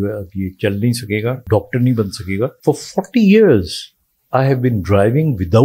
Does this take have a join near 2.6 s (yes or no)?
yes